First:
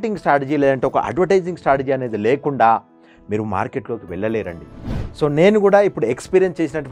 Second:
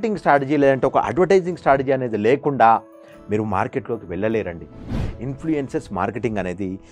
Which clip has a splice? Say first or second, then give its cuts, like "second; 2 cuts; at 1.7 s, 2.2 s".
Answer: second; 1 cut; at 4.8 s